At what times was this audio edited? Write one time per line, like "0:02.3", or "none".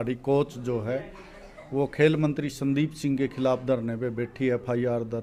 none